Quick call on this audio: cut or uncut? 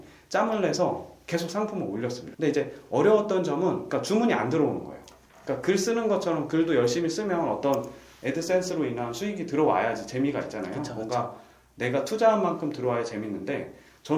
cut